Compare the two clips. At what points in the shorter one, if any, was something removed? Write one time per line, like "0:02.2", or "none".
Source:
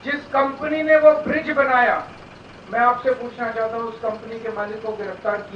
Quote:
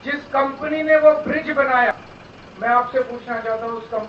0:01.9